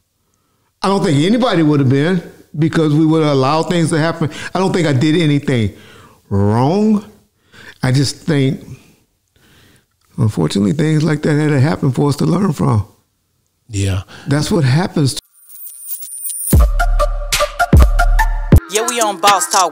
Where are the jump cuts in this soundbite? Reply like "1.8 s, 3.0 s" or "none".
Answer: 15.2 s